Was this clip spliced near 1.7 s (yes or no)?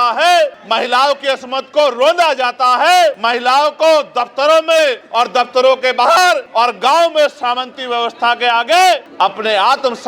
no